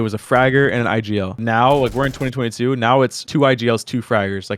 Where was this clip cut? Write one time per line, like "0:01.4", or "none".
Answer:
0:01.4
0:03.2